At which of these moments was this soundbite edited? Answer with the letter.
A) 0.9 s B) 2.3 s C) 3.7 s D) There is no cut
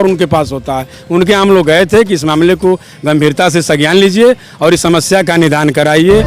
D